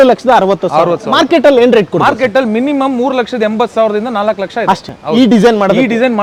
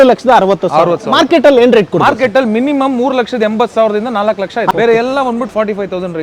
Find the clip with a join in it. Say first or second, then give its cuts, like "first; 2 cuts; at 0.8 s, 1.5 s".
second; 1 cut; at 4.7 s